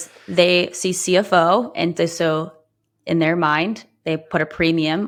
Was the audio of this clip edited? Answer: no; 0 cuts

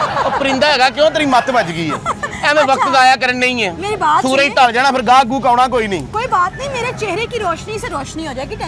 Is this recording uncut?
yes; 0 cuts

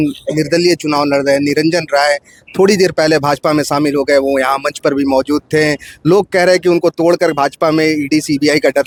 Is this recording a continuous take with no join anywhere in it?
yes; 0 cuts

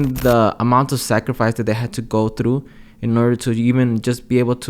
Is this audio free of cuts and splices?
yes; 0 cuts

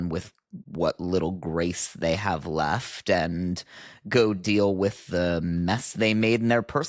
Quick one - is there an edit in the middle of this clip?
no; 0 cuts

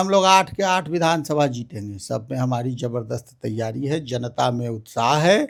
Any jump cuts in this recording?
no; 0 cuts

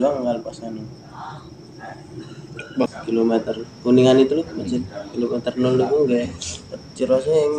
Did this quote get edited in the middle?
yes; 1 cut; at 2.9 s

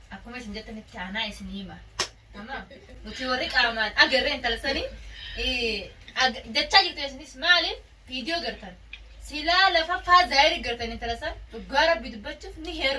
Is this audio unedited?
yes; 0 cuts

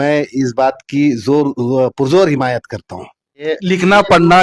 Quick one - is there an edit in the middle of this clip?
yes; 1 cut; at 3.4 s

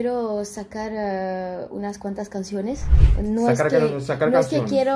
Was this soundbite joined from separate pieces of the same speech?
yes; 1 cut; at 3.0 s

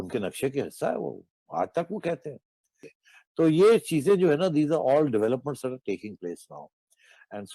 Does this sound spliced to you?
yes; 1 cut; at 2.9 s

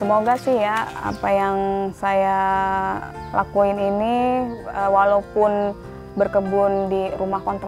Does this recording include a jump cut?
yes; 2 cuts; at 1.0 s, 3.1 s

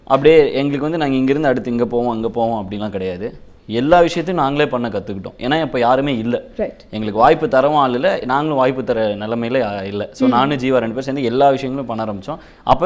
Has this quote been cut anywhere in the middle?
yes; 1 cut; at 7.3 s

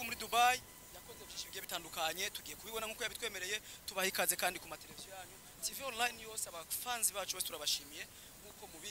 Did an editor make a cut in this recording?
no; 0 cuts

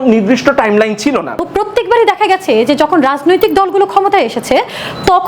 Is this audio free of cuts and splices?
no; 1 cut; at 1.5 s

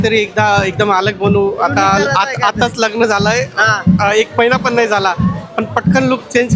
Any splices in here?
no; 0 cuts

